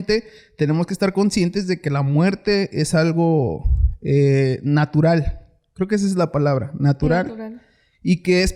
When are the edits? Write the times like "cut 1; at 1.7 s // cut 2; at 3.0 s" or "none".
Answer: none